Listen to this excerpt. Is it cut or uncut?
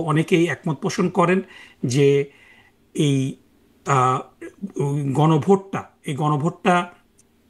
uncut